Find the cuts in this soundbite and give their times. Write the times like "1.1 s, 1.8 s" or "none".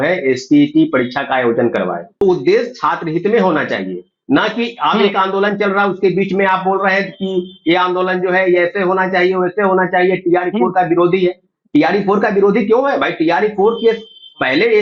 2.2 s